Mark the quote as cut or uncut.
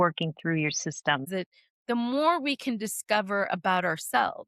cut